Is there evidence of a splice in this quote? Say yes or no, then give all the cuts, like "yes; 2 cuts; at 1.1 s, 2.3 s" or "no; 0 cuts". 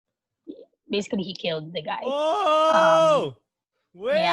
no; 0 cuts